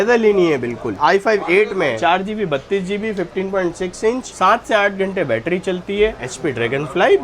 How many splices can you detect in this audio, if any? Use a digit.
3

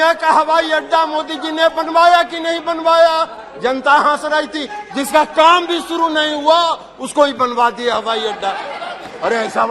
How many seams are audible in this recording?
0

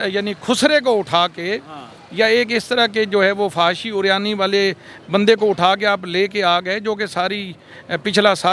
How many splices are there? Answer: 0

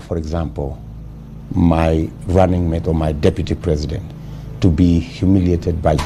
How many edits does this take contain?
0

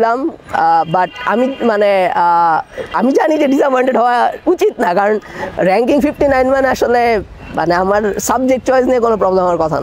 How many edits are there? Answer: 0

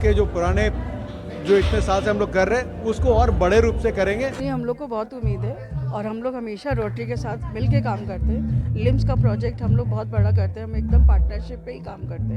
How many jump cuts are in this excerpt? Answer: 1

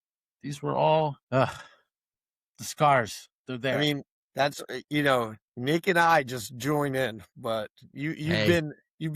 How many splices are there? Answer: 2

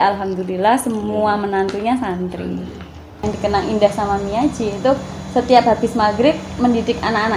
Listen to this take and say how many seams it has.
1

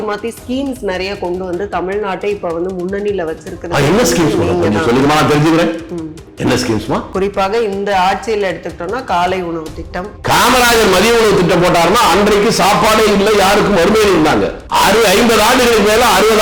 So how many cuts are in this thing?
2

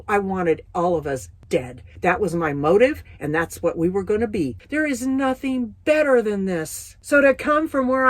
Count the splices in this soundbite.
1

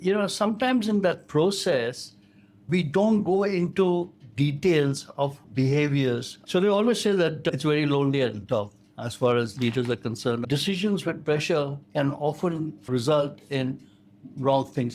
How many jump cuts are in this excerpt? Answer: 2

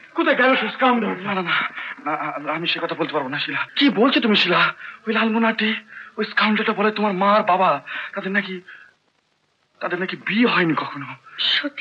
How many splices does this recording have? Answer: 1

